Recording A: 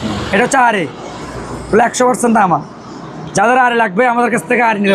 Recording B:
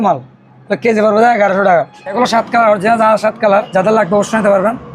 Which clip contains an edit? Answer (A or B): B